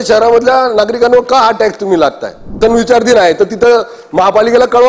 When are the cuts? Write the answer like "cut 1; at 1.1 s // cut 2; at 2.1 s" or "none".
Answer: cut 1; at 2.6 s